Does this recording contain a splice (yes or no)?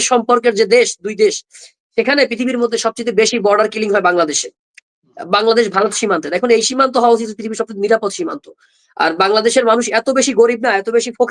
no